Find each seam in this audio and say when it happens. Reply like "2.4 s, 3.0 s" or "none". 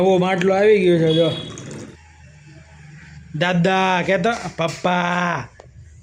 1.8 s